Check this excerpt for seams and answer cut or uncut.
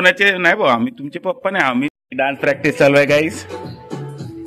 cut